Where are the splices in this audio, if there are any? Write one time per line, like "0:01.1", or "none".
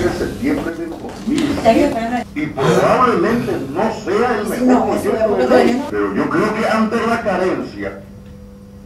0:02.2
0:05.9